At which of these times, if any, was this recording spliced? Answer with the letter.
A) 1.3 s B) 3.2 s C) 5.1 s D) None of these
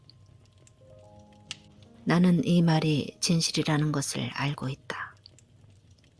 C